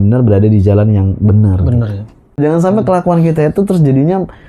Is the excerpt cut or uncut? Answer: cut